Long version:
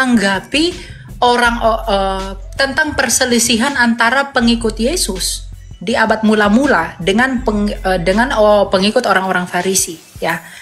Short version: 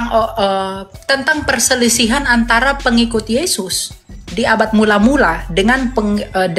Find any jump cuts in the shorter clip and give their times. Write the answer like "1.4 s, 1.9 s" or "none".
none